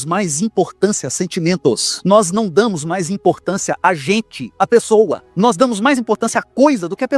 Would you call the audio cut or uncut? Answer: cut